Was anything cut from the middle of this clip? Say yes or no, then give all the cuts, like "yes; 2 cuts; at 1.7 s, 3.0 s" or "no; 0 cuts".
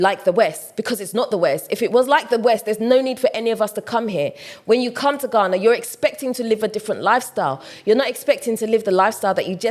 no; 0 cuts